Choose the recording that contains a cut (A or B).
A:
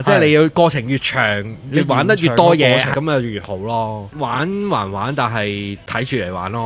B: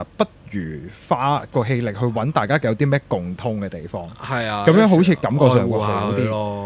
A